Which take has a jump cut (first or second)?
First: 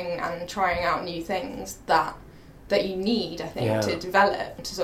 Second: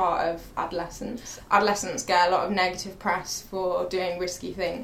second